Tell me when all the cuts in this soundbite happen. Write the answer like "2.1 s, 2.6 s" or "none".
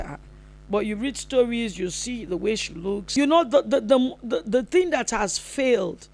3.1 s